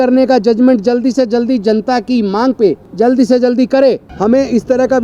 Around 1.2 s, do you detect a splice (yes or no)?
no